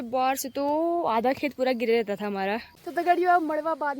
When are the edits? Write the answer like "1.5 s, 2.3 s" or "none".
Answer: 2.8 s